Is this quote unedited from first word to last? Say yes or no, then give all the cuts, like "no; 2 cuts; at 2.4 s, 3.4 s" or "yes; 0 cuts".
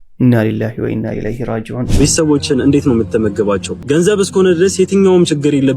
no; 2 cuts; at 1.8 s, 3.8 s